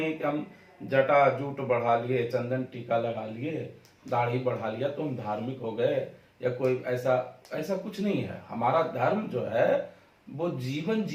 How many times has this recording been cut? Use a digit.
0